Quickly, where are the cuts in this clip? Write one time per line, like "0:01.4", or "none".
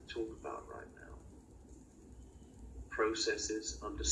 0:01.0